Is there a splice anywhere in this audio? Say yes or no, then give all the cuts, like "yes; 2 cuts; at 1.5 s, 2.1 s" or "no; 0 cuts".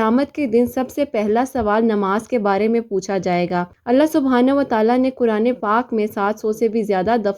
no; 0 cuts